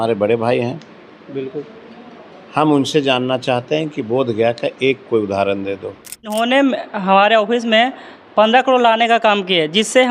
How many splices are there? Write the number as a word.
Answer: one